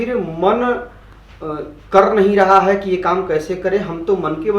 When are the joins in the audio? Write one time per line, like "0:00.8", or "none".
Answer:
none